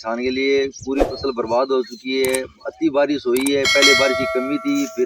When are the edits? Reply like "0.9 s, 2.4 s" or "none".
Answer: none